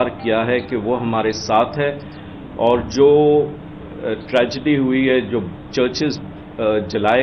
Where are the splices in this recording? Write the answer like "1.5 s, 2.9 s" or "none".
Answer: none